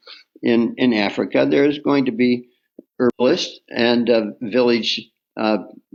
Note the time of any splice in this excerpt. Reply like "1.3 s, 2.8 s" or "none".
none